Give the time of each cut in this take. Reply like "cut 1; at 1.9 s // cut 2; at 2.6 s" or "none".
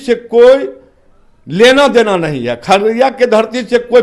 none

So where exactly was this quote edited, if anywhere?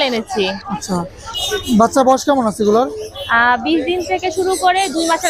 none

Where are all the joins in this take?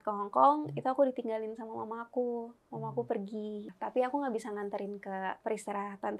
cut 1; at 3.7 s // cut 2; at 5.4 s

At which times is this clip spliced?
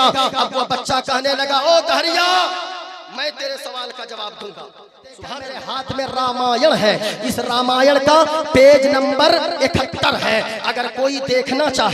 cut 1; at 5.7 s

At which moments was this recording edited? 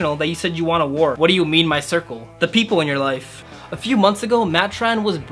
cut 1; at 1.2 s // cut 2; at 3.4 s

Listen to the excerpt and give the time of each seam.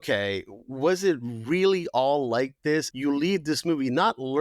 cut 1; at 2.9 s

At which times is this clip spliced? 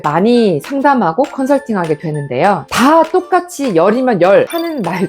cut 1; at 2.7 s

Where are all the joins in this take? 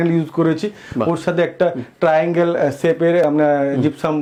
none

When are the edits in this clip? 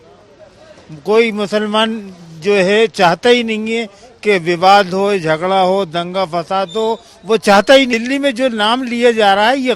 cut 1; at 7.9 s

